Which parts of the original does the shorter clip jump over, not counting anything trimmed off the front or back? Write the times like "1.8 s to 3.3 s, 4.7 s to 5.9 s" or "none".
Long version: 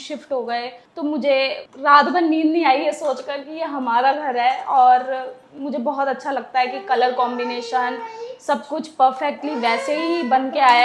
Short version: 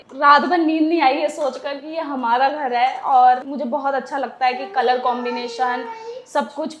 5.1 s to 5.6 s